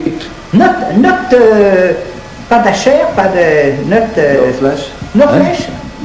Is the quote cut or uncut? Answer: uncut